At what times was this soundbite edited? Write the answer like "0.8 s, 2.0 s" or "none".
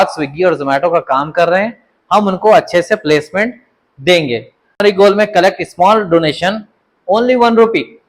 4.8 s